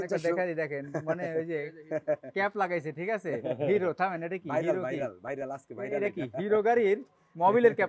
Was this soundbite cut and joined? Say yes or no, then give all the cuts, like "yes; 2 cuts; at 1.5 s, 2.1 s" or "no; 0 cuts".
no; 0 cuts